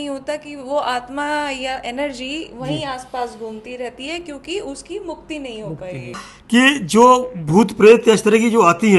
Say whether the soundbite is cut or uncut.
uncut